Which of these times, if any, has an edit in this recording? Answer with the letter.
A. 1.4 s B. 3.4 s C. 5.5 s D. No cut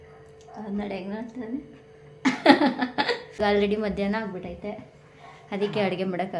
B